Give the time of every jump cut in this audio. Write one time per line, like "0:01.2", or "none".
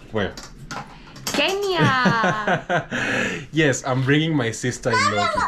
none